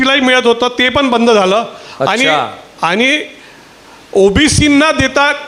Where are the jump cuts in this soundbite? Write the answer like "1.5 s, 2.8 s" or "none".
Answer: none